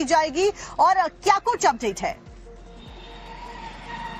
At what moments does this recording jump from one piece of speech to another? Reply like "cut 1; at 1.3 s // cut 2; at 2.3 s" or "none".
none